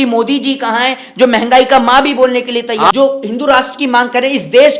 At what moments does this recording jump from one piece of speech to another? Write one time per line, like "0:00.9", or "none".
0:02.9

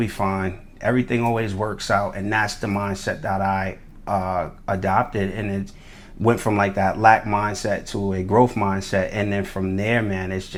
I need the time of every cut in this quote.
none

